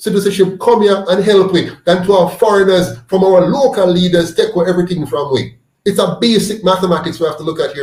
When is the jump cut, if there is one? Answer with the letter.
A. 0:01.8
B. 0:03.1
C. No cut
C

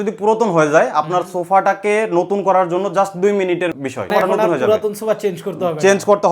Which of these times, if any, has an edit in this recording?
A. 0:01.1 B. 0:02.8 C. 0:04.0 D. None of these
C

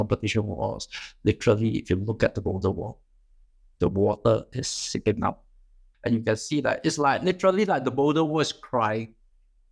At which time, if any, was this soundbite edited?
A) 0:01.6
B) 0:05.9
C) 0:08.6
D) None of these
B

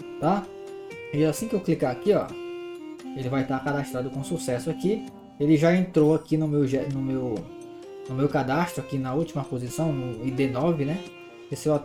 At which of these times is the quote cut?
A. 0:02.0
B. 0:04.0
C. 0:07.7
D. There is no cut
D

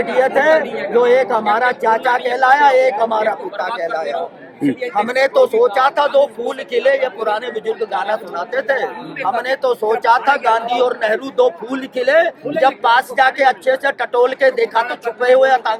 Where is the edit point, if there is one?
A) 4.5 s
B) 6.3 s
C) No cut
C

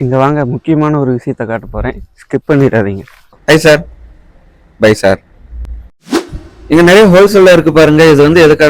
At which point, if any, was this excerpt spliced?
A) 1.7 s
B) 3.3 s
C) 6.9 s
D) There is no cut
B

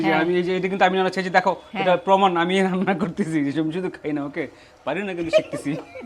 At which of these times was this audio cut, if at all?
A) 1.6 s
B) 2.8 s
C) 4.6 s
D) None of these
D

